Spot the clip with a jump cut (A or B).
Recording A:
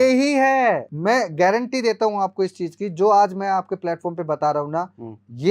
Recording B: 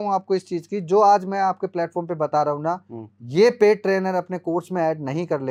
A